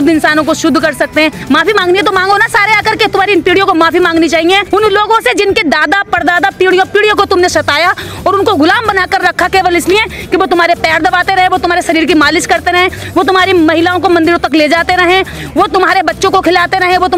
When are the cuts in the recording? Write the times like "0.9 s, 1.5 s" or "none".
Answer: 1.4 s, 4.6 s